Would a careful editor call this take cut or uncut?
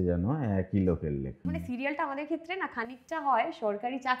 cut